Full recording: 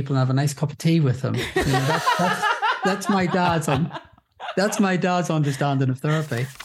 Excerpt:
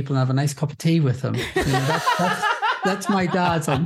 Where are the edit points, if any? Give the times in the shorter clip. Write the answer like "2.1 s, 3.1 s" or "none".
none